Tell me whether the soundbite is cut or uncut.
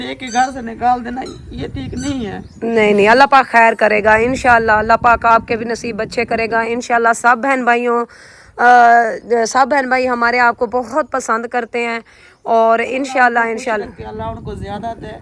uncut